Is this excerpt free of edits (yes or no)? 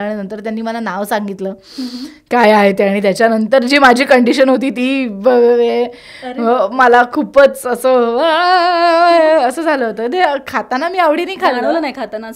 yes